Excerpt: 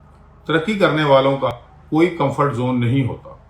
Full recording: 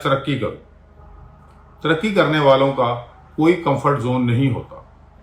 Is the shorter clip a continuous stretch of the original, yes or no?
no